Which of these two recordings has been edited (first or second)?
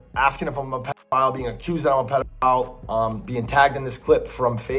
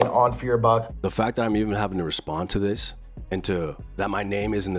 second